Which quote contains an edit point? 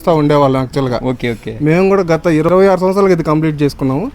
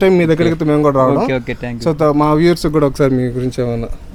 first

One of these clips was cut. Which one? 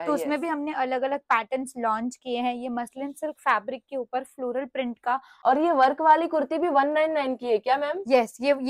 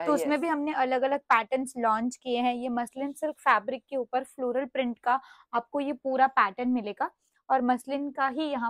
first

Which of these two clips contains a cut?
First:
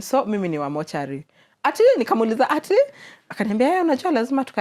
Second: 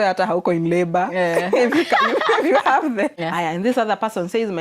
second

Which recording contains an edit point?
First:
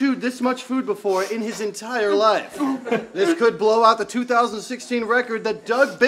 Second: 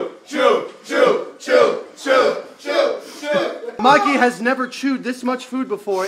second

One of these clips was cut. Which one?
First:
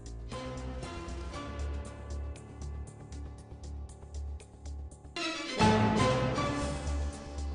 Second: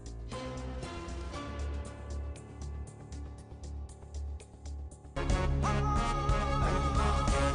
first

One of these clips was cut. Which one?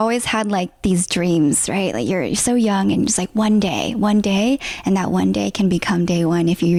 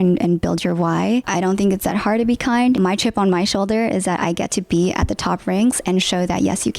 second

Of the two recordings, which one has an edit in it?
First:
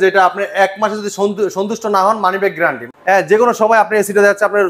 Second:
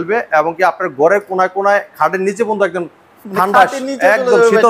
first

